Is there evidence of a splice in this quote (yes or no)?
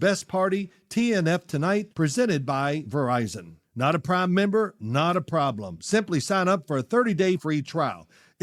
no